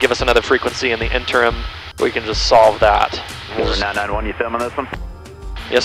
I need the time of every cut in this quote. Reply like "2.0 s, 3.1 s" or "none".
3.5 s